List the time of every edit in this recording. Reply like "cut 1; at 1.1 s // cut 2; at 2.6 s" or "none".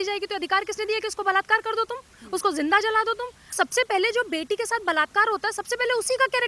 cut 1; at 3.5 s